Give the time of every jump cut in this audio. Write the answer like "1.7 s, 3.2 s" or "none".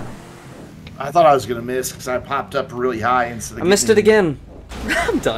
none